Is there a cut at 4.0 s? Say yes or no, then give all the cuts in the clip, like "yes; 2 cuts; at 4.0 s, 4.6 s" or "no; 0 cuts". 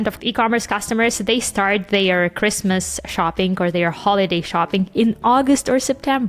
no; 0 cuts